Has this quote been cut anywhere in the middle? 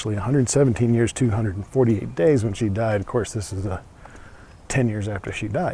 no; 0 cuts

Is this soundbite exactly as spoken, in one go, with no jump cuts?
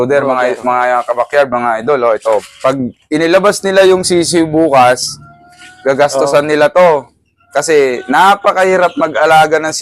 no; 1 cut; at 2.5 s

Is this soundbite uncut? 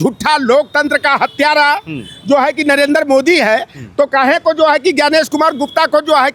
yes; 0 cuts

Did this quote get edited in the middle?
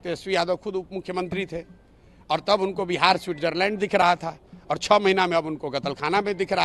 no; 0 cuts

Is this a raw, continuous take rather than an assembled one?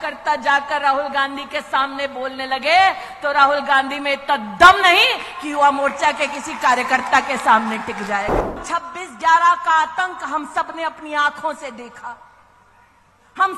no; 1 cut; at 8.6 s

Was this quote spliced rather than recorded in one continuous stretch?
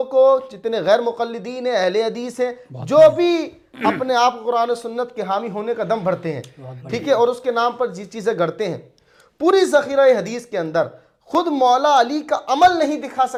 no; 0 cuts

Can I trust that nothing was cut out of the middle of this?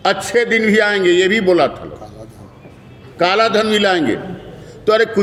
yes; 0 cuts

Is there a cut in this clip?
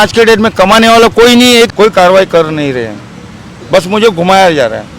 yes; 1 cut; at 1.7 s

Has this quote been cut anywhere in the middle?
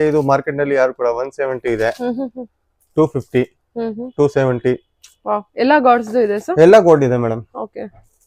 no; 0 cuts

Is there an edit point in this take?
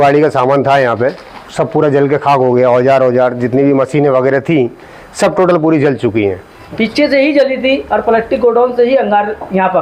yes; 1 cut; at 6.6 s

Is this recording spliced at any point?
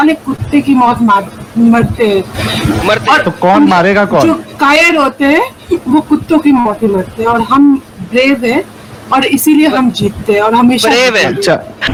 no; 0 cuts

